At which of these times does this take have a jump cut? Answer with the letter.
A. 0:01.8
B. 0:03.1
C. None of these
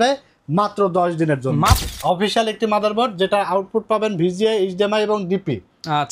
A